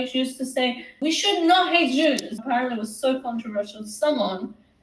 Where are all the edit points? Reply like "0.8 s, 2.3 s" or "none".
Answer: 0.9 s, 2.3 s